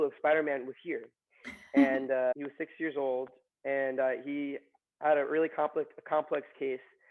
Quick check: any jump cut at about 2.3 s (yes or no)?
yes